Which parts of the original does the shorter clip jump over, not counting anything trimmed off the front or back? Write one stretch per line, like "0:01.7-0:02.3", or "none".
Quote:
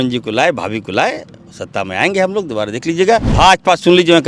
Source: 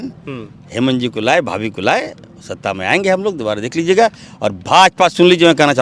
0:04.2-0:04.6